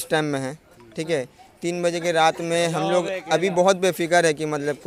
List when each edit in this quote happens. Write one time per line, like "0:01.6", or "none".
none

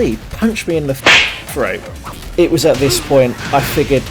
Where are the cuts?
0:02.2

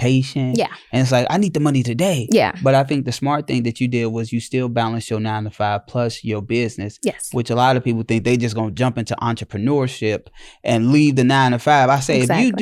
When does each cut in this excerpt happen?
none

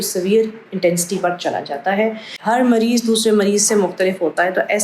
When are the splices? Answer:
0:02.4

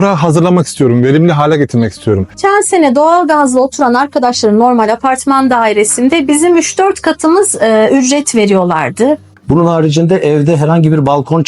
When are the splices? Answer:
0:02.4
0:09.3

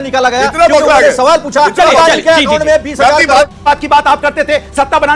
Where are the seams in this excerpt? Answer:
0:03.6

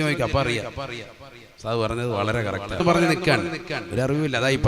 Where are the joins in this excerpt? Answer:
0:02.8

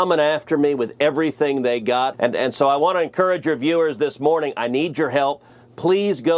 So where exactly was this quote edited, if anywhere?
0:02.1

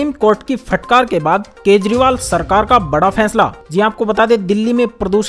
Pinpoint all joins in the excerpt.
none

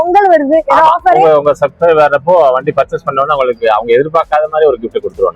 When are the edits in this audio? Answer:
none

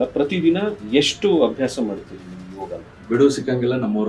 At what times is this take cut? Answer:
0:02.9

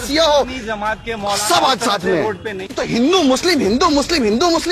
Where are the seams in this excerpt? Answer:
0:02.8

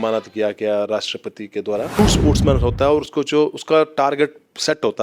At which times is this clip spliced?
0:02.0

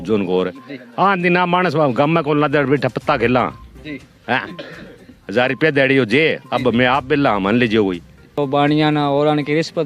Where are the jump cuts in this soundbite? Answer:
0:08.3

